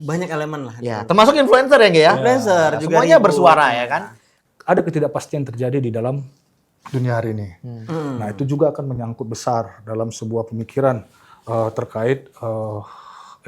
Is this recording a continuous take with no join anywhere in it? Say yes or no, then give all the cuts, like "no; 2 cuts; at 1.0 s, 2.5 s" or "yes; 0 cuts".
no; 1 cut; at 4.3 s